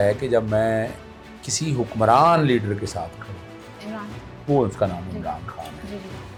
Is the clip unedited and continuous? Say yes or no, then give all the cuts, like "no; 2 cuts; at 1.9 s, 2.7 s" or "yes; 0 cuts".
yes; 0 cuts